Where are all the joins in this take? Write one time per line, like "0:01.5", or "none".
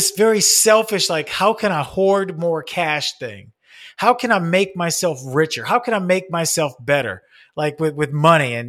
none